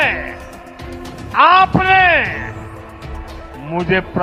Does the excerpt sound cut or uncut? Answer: uncut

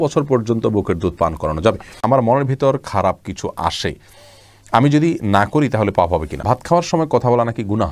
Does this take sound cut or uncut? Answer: cut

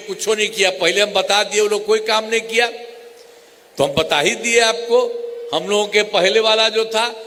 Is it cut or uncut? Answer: uncut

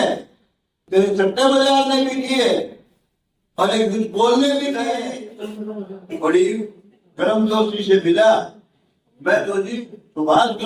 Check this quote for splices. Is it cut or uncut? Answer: cut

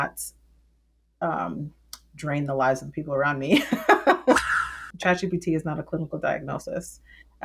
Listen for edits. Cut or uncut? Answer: cut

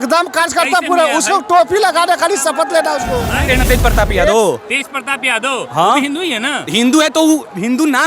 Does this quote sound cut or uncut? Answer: cut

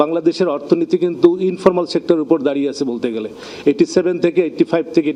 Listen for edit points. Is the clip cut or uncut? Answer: uncut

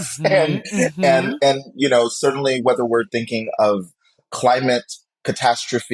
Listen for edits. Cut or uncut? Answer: cut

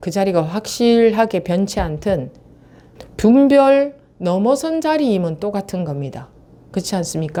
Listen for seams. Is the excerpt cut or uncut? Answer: uncut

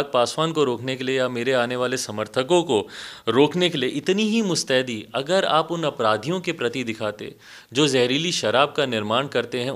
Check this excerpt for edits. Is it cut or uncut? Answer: uncut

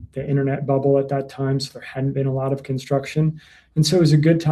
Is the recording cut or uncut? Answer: uncut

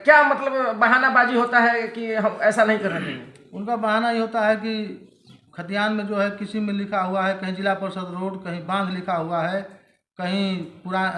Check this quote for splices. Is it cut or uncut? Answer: uncut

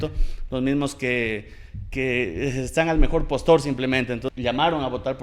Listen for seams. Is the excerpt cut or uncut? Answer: cut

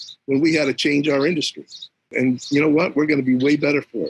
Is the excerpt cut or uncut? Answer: cut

